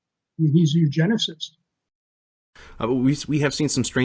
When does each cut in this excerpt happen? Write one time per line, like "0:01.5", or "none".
0:02.3